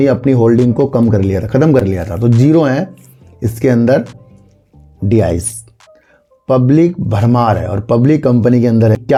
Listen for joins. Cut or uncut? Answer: uncut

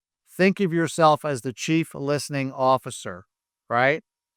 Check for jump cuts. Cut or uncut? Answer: uncut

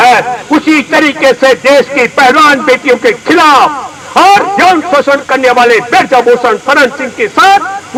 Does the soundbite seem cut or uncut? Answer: uncut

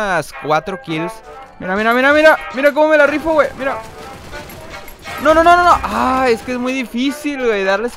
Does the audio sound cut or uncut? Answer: cut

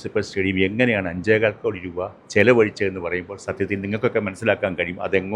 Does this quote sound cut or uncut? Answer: uncut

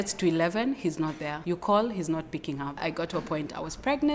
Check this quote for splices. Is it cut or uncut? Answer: cut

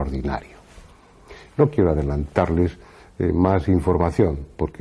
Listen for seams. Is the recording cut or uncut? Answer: cut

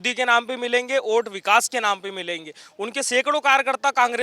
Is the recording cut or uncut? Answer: uncut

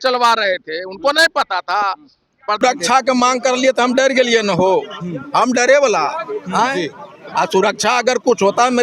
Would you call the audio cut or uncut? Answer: cut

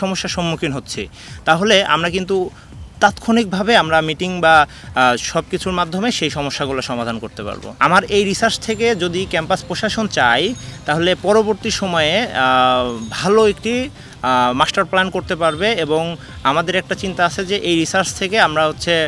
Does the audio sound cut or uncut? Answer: cut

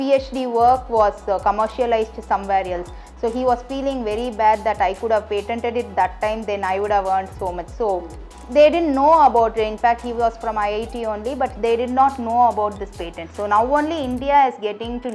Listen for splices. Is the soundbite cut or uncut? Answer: uncut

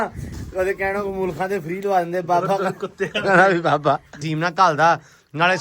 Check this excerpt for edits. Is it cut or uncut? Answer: cut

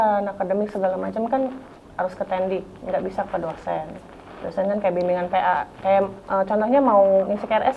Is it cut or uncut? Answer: uncut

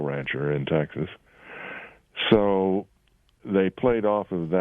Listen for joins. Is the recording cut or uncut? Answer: cut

